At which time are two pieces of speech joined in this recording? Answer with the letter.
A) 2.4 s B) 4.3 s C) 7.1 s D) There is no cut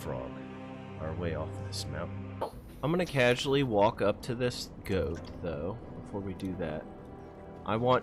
A